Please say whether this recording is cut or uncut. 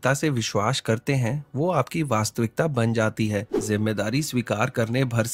cut